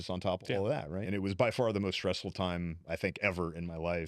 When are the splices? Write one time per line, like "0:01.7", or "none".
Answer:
0:01.0